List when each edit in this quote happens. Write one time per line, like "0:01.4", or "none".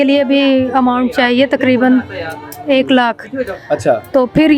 none